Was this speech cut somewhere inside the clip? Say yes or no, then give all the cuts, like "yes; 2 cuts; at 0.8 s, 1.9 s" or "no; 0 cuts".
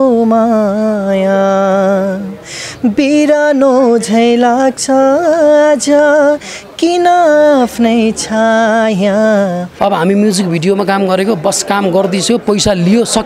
yes; 1 cut; at 9.7 s